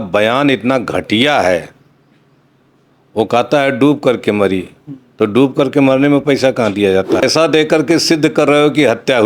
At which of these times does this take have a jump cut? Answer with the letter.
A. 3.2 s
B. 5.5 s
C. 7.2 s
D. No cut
C